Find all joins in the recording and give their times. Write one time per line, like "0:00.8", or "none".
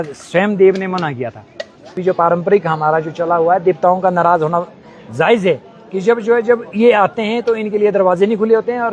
0:01.9